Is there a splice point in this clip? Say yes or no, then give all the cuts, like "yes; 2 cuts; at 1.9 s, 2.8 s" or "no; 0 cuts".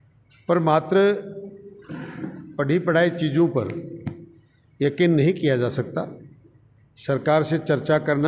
no; 0 cuts